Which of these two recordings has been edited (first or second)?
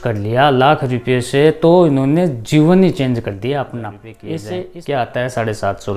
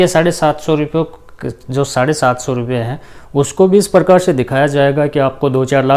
first